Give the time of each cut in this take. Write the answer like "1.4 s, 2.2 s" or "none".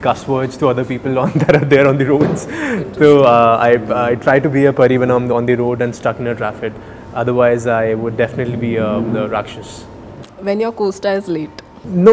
none